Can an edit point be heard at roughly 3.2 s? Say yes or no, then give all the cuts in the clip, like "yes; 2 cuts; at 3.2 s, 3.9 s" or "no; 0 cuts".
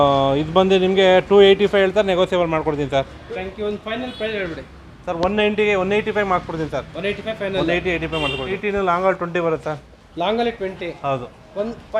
yes; 2 cuts; at 3.2 s, 8.6 s